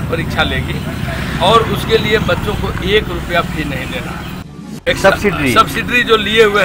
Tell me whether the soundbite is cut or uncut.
cut